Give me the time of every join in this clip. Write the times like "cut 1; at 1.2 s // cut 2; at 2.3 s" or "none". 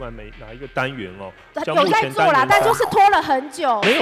none

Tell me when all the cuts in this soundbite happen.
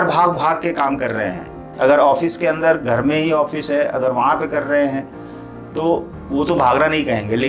cut 1; at 1.6 s

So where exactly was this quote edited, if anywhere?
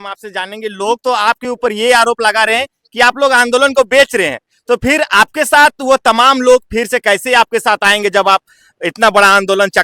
none

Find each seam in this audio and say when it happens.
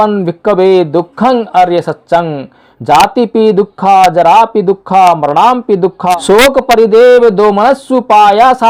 cut 1; at 6.1 s

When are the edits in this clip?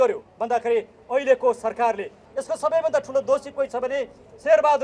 cut 1; at 2.2 s

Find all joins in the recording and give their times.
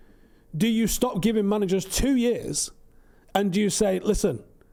none

